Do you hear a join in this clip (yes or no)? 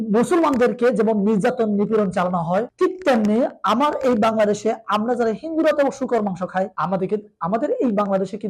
yes